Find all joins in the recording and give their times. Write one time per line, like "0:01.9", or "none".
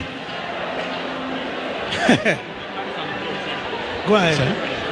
none